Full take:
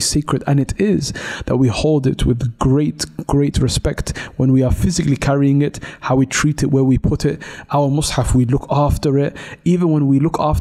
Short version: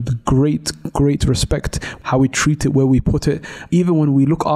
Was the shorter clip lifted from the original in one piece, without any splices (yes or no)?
no